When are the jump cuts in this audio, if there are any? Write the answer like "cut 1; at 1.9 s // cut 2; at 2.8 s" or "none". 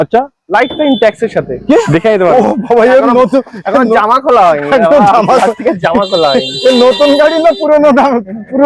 cut 1; at 1.8 s